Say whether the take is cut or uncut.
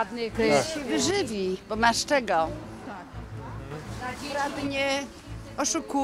uncut